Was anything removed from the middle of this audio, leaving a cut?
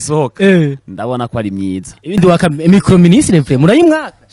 yes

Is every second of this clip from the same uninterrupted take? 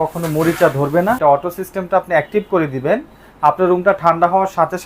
no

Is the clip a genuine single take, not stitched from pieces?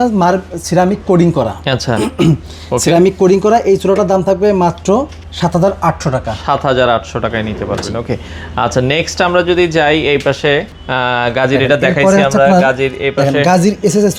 yes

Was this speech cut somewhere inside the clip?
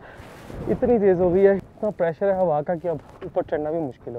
yes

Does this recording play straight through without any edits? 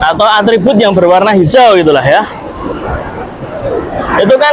yes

